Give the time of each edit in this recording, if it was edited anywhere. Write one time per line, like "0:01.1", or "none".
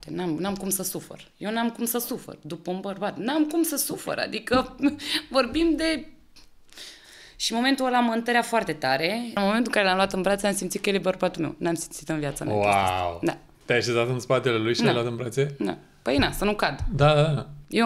0:09.4
0:13.5